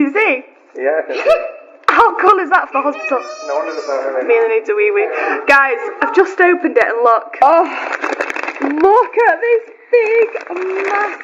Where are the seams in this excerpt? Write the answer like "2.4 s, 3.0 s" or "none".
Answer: none